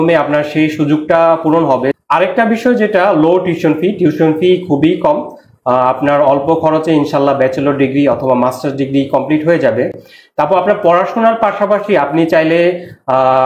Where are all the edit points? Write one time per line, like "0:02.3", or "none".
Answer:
0:02.0